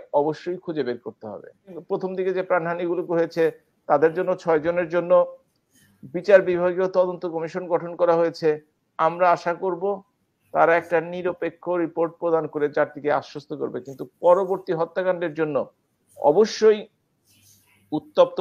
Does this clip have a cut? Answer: yes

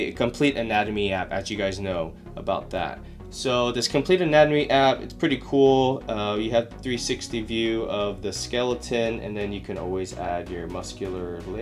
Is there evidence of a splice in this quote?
no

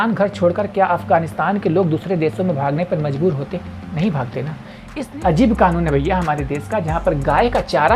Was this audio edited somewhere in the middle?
yes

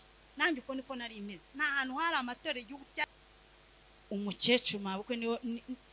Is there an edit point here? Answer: yes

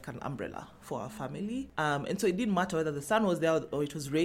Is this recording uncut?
yes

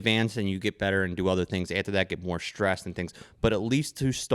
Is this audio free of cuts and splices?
yes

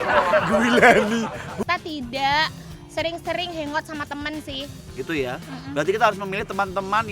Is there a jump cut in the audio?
yes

